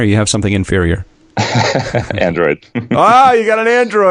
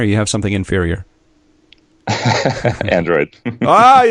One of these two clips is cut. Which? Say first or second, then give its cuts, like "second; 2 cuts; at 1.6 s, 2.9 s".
first; 1 cut; at 1.2 s